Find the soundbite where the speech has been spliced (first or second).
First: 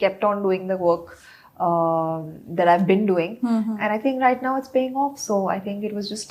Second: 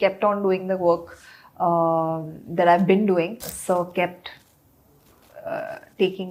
second